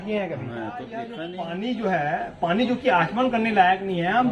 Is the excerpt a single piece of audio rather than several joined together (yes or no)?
no